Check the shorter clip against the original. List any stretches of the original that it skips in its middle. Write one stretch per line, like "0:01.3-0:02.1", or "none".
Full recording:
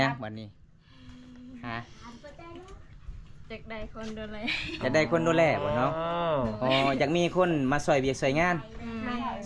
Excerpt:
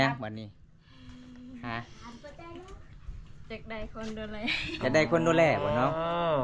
none